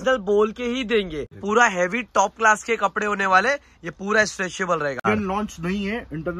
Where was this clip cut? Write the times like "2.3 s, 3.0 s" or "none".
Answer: 1.4 s, 5.1 s